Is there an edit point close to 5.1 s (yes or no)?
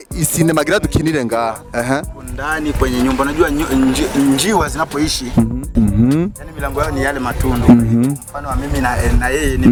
no